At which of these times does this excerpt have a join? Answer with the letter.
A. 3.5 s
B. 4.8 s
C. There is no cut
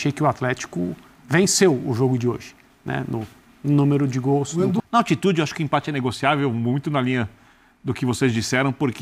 B